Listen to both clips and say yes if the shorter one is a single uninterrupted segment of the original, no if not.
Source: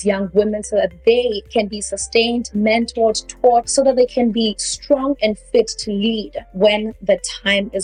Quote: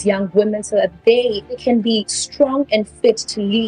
no